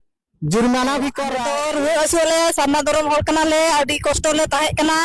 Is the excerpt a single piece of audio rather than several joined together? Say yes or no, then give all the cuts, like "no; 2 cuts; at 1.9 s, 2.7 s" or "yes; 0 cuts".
no; 1 cut; at 1.4 s